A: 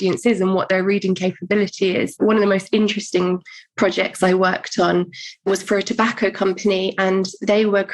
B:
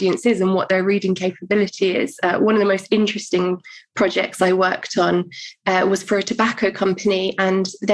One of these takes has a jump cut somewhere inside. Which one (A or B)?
A